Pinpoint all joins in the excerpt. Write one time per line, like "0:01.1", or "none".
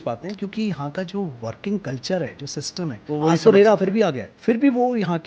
0:04.3